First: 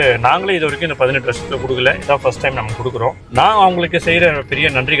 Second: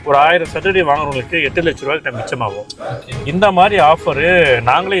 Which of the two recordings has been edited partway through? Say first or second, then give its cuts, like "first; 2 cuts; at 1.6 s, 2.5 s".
first; 1 cut; at 3.2 s